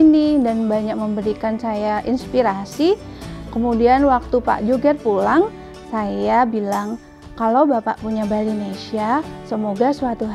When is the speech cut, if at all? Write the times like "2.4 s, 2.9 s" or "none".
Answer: none